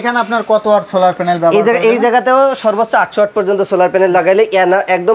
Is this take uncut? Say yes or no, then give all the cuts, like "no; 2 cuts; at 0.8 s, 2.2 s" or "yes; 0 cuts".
yes; 0 cuts